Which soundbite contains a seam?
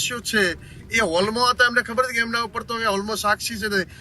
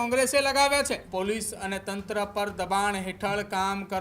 second; 1 cut; at 1.1 s

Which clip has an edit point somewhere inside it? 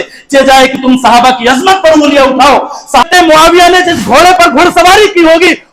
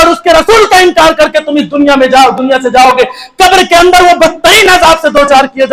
first; 1 cut; at 3.1 s

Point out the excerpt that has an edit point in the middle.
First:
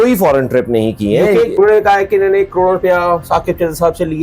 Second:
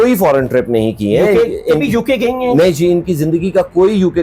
first; 1 cut; at 1.5 s

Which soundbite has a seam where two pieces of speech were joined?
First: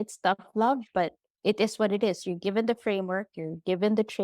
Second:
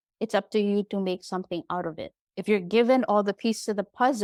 first; 1 cut; at 1.2 s

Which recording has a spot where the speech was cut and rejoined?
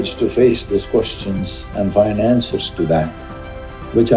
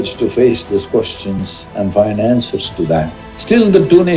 second; 1 cut; at 3.3 s

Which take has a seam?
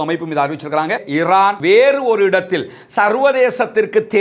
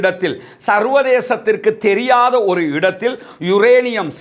first; 1 cut; at 1.1 s

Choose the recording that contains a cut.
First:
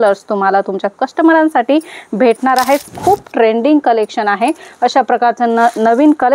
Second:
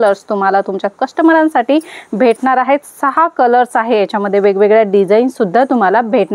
first; 1 cut; at 2.9 s

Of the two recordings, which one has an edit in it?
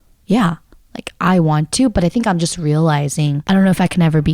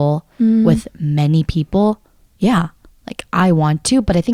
first; 1 cut; at 3.4 s

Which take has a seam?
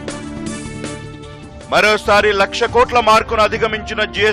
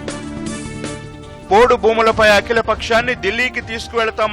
second; 1 cut; at 1.0 s

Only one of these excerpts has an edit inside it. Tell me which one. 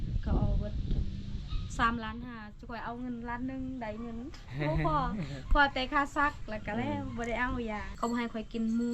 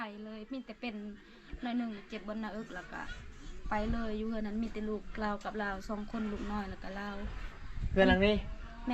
first; 1 cut; at 7.9 s

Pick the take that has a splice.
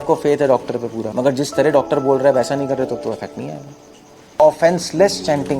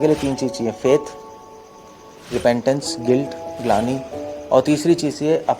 first; 2 cuts; at 1.1 s, 4.3 s

